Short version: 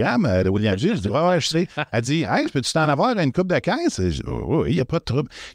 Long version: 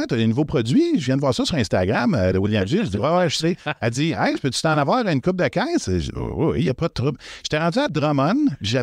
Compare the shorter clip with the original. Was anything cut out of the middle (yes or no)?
no